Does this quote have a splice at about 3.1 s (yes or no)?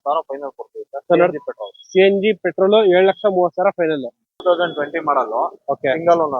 no